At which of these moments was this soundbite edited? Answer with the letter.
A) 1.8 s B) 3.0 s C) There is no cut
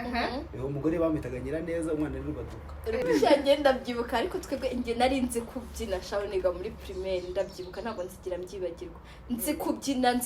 B